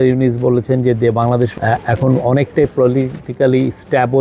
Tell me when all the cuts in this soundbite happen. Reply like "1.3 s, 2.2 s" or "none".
1.6 s